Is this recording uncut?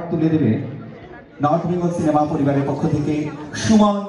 yes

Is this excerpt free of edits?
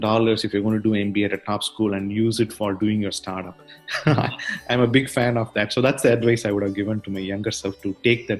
yes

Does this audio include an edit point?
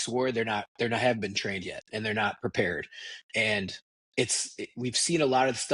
no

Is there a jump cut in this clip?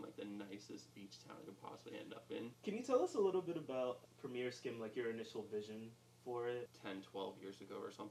yes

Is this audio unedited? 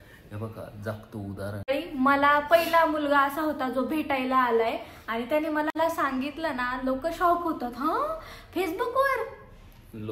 no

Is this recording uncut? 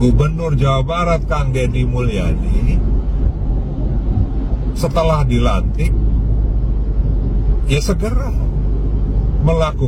yes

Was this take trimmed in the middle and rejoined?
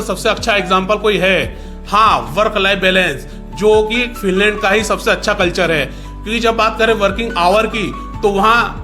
no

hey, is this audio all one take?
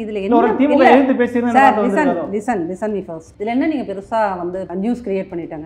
no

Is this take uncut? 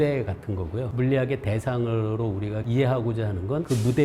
yes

